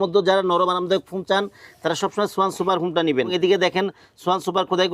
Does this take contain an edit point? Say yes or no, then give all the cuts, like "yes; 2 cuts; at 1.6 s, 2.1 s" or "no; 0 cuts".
yes; 1 cut; at 3.3 s